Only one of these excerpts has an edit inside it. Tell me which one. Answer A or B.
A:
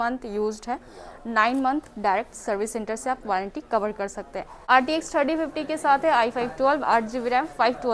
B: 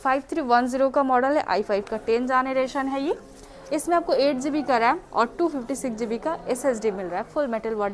A